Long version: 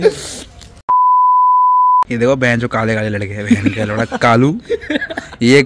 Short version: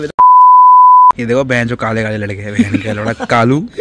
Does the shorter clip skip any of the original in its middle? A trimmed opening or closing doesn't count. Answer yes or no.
yes